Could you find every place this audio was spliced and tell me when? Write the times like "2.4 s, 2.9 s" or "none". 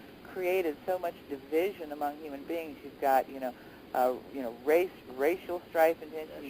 2.8 s